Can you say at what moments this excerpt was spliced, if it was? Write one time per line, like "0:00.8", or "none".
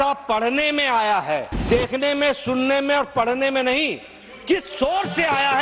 0:01.6